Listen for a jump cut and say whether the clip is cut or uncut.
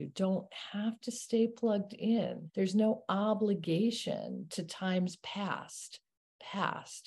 cut